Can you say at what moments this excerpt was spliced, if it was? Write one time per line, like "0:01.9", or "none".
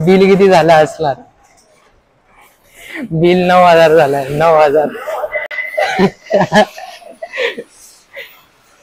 none